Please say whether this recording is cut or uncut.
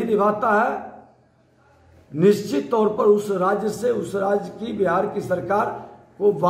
uncut